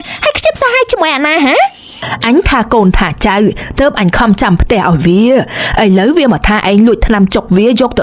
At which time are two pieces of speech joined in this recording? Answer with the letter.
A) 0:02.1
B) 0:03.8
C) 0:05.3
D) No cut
A